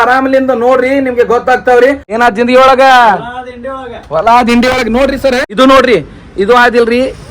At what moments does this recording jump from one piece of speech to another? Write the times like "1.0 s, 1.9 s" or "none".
2.1 s, 5.5 s